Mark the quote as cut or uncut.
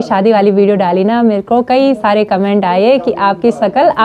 uncut